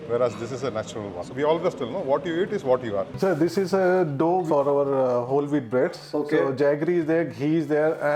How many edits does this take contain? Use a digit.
3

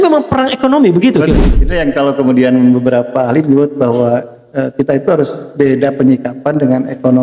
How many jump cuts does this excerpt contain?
0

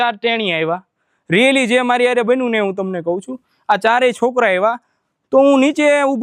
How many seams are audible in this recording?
0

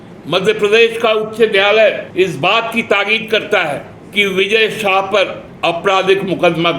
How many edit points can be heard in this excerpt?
3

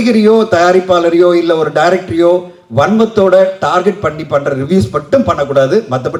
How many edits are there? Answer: 0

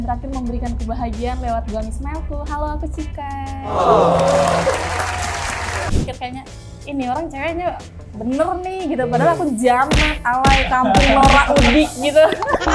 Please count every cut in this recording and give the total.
1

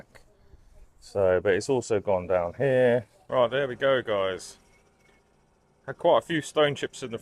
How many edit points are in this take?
1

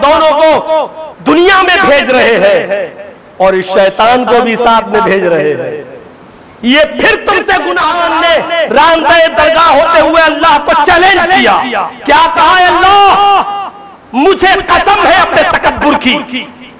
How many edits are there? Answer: 1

